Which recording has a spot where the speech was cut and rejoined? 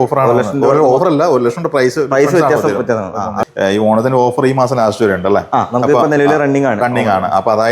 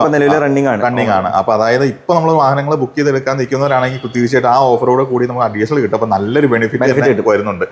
first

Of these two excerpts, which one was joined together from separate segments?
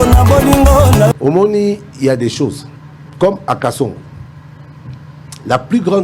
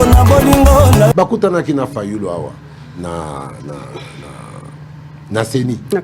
second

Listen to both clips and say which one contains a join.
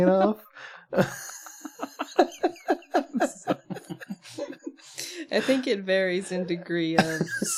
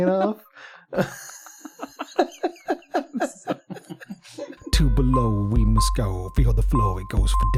second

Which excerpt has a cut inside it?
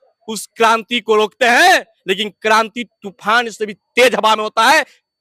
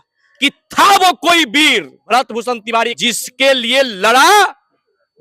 second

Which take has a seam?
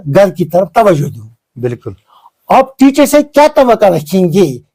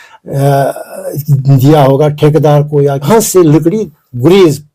second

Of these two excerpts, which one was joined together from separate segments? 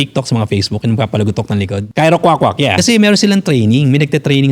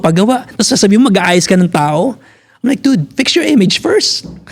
first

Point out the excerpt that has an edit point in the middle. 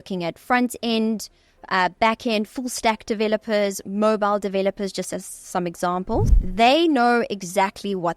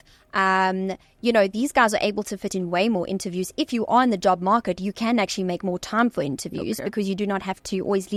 first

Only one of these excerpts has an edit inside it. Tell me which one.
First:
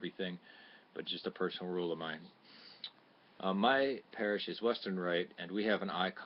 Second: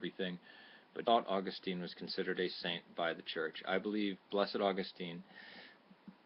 first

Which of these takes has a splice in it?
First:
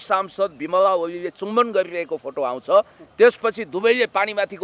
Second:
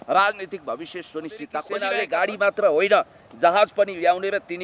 second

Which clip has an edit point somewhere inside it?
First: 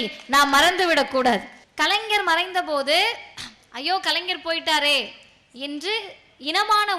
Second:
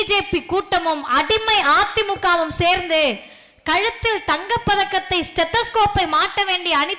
first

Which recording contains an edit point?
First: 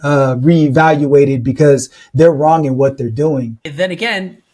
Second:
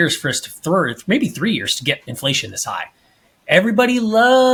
first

